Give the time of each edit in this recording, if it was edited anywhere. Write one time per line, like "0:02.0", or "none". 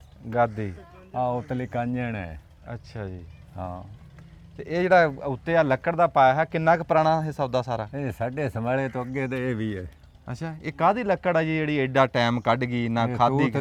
none

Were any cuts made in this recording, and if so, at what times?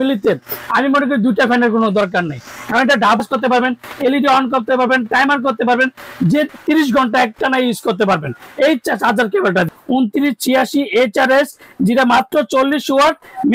0:03.2
0:06.5
0:09.8

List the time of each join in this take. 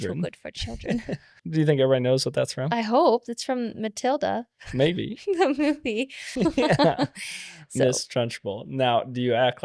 0:01.4
0:06.3

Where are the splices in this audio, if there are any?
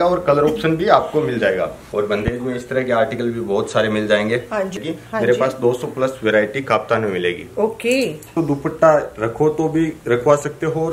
0:01.8
0:04.7
0:08.3

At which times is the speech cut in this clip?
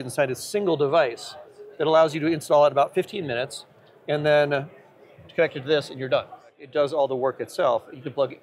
0:06.6

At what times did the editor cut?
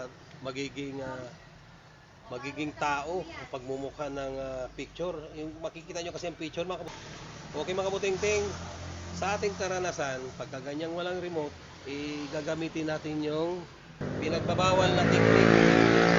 0:14.0

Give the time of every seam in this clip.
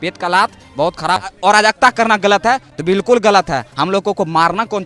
0:01.3

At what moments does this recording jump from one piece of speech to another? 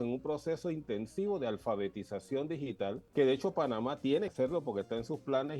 0:03.0
0:04.3

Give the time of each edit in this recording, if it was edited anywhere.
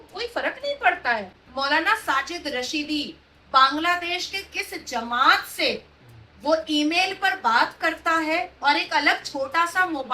0:01.4

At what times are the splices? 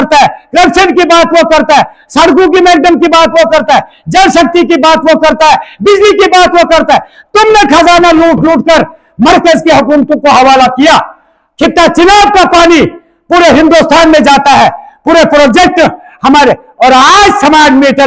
none

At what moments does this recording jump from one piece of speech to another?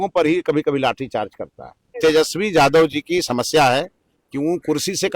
0:02.0

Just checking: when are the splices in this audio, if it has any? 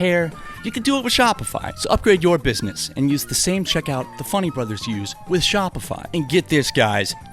none

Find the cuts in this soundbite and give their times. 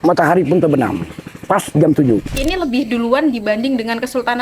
0:02.4

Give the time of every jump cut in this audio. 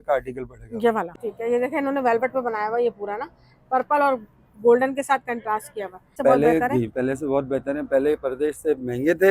0:01.1
0:06.1

